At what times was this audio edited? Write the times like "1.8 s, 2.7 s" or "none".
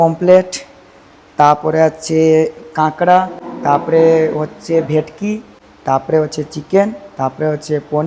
none